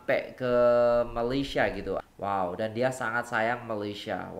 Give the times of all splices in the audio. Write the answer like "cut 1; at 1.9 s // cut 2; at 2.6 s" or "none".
cut 1; at 2.0 s

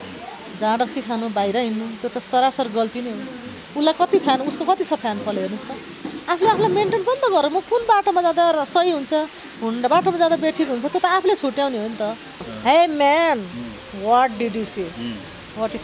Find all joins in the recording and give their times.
cut 1; at 12.4 s

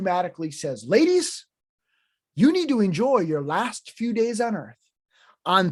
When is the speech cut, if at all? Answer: none

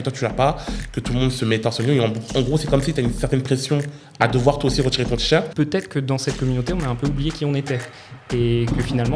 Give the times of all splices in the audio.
cut 1; at 5.5 s // cut 2; at 8.0 s

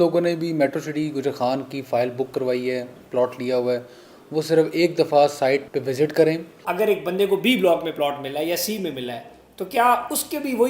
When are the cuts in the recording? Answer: cut 1; at 5.7 s // cut 2; at 6.6 s

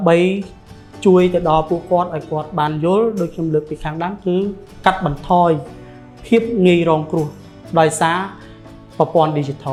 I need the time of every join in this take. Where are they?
none

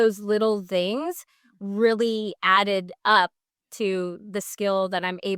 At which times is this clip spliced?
none

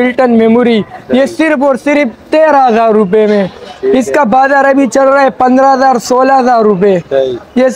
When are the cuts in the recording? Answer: none

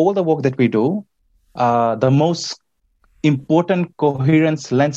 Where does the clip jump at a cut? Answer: none

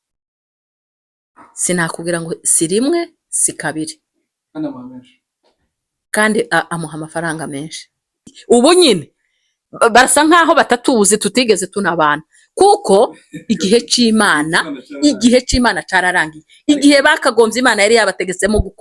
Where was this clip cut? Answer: cut 1; at 8.3 s

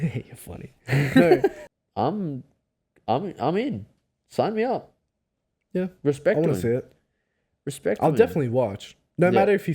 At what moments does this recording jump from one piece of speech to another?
cut 1; at 1.6 s

